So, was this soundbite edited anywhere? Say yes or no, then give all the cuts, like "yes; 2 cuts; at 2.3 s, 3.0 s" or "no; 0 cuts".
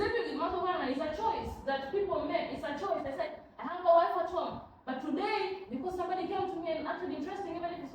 no; 0 cuts